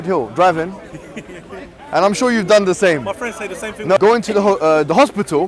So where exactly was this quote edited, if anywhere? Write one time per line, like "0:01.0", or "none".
0:04.0